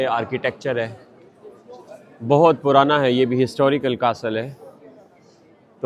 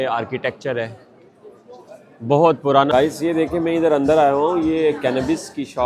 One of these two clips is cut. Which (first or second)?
second